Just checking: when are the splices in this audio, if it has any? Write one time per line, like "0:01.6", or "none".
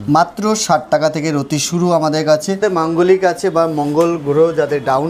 0:02.6